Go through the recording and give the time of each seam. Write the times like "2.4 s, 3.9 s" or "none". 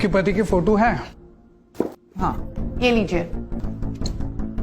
2.5 s, 3.6 s